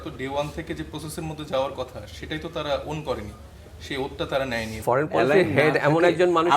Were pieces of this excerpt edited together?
yes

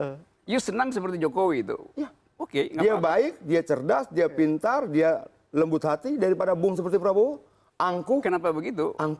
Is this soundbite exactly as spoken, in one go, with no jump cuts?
yes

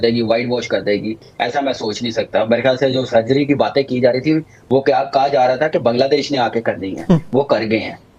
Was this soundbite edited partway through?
no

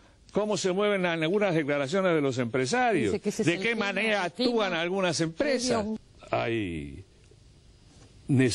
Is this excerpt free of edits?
no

